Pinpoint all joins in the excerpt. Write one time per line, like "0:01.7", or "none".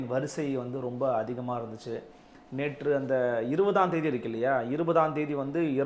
none